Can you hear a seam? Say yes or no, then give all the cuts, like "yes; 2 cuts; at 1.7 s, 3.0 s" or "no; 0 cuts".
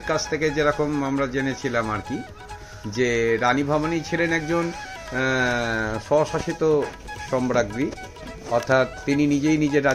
no; 0 cuts